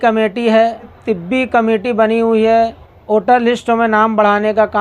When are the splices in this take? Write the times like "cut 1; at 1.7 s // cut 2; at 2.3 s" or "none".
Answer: cut 1; at 1.0 s // cut 2; at 2.9 s